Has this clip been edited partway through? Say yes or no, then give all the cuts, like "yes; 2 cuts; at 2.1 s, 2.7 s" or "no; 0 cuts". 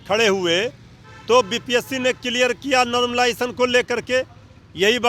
no; 0 cuts